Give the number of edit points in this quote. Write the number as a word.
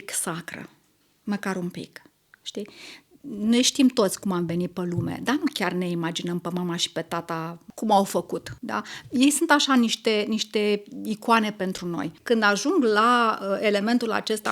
three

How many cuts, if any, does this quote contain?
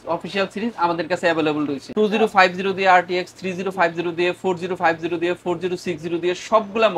zero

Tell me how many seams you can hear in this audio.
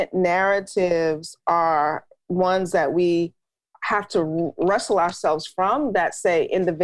zero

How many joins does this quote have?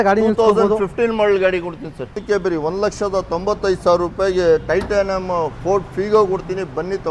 one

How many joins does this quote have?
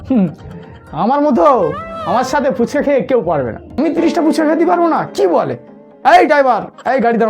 one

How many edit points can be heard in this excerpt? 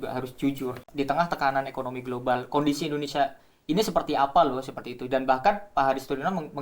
one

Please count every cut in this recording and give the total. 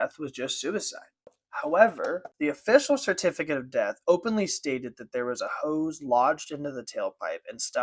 two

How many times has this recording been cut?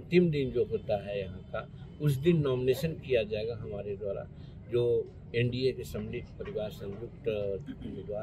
zero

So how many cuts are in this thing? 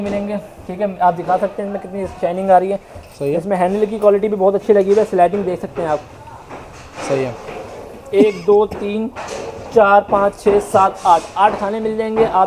zero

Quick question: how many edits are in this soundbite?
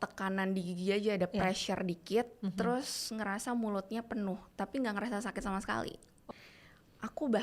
one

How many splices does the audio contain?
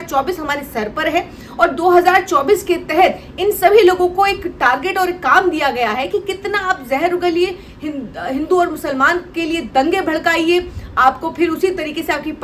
zero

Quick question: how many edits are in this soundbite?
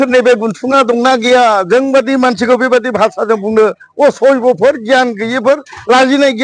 zero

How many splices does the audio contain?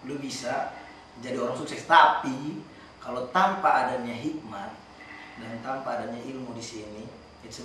zero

